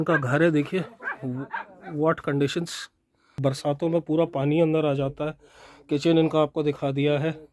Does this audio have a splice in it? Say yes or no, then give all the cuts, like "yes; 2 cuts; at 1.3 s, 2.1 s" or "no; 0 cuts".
yes; 1 cut; at 3.4 s